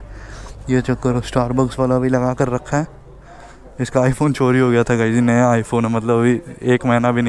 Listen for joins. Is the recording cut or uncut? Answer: uncut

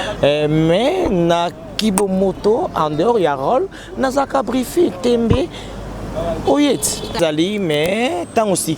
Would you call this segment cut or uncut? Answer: cut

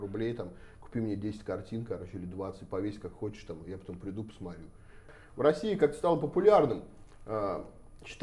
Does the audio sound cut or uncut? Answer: cut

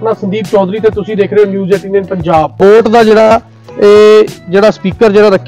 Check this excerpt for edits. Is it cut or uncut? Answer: cut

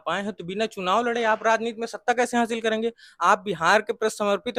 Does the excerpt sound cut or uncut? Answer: uncut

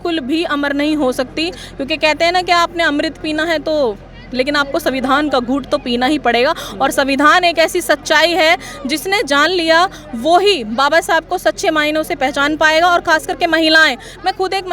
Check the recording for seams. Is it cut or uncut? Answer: uncut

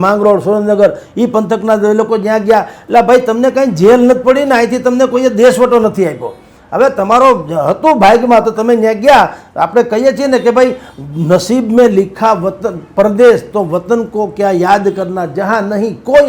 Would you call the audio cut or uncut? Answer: uncut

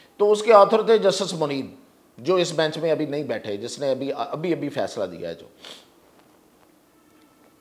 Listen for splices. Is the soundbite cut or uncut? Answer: uncut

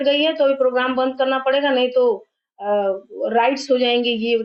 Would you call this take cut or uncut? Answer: uncut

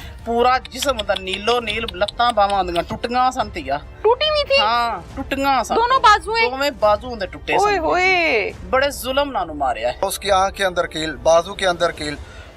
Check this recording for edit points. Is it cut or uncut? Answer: cut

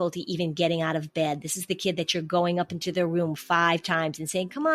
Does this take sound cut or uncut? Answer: uncut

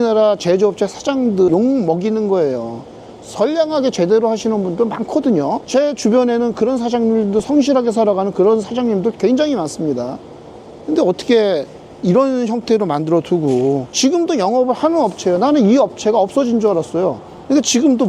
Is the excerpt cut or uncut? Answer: uncut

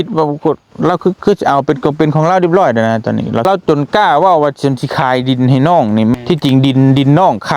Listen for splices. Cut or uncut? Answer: cut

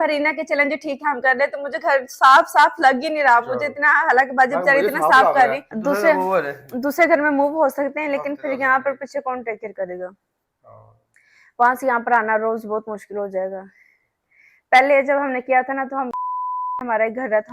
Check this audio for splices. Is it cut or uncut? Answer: cut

